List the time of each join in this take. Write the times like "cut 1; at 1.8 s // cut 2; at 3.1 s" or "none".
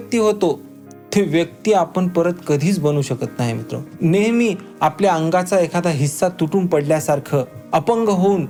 none

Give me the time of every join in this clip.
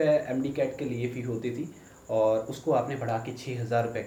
none

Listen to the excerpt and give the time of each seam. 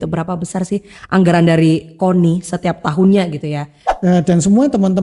cut 1; at 3.9 s

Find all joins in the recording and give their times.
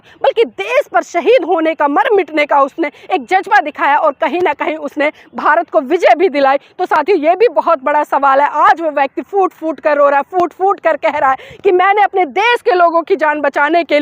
none

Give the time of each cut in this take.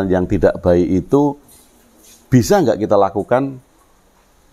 none

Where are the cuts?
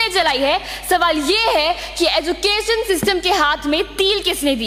none

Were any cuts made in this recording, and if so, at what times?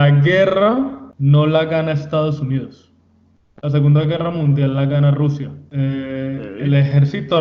cut 1; at 1.0 s // cut 2; at 5.6 s

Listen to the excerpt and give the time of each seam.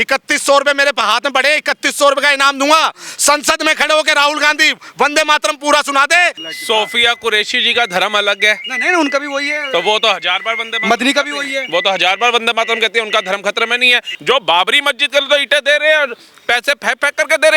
cut 1; at 6.4 s // cut 2; at 14.1 s

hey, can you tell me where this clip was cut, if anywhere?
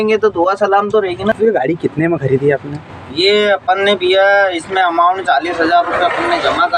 cut 1; at 1.3 s

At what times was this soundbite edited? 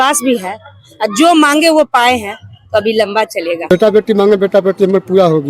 cut 1; at 3.7 s

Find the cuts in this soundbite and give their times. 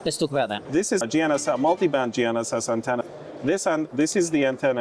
cut 1; at 0.8 s // cut 2; at 3.0 s

